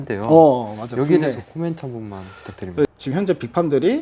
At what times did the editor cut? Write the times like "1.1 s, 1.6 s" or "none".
2.9 s